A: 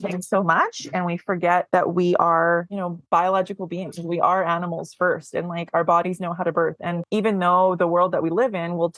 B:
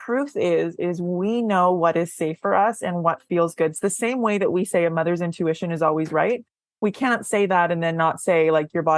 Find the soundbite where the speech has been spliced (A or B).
A